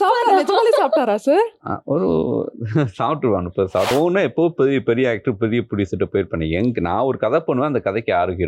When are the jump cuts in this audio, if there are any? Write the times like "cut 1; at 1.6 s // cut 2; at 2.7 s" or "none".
cut 1; at 3.9 s